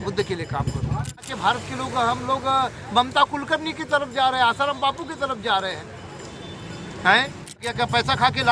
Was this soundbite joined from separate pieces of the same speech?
yes; 2 cuts; at 1.2 s, 7.6 s

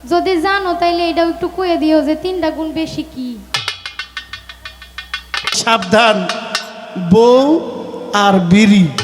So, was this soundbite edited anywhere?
yes; 1 cut; at 5.6 s

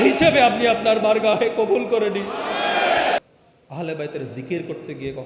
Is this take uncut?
no; 1 cut; at 3.2 s

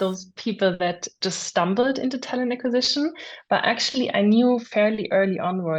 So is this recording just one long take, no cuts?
yes; 0 cuts

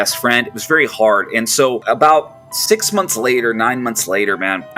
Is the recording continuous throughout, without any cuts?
yes; 0 cuts

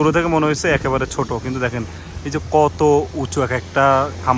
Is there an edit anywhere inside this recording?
no; 0 cuts

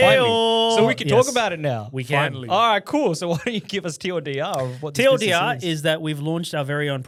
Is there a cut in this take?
no; 0 cuts

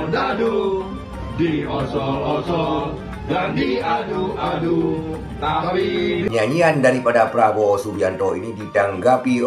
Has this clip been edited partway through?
yes; 1 cut; at 6.3 s

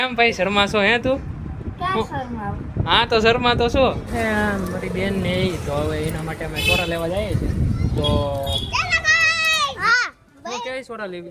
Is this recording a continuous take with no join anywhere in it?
no; 2 cuts; at 4.1 s, 9.8 s

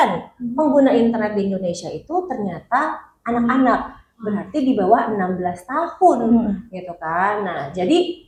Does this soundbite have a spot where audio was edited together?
no; 0 cuts

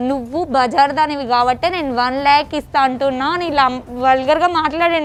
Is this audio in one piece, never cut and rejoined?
yes; 0 cuts

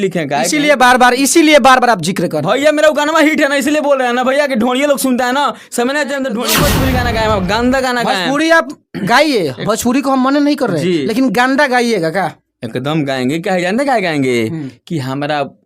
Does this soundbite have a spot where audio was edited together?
yes; 1 cut; at 6.6 s

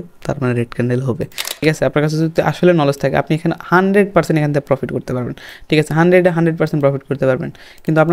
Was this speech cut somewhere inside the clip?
yes; 1 cut; at 1.6 s

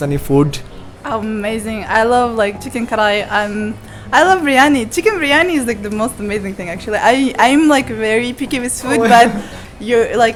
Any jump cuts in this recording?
no; 0 cuts

